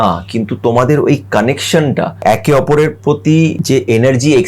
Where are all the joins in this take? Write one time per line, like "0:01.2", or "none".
0:02.1
0:03.6